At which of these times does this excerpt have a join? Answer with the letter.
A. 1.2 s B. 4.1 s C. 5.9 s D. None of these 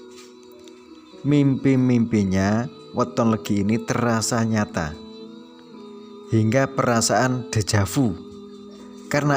A